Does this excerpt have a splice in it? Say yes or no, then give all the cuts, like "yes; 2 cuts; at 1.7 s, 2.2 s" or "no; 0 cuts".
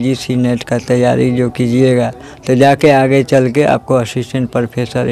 no; 0 cuts